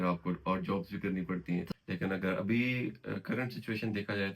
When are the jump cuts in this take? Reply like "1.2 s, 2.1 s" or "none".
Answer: 1.7 s